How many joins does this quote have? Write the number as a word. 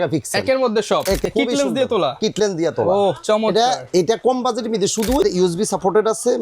two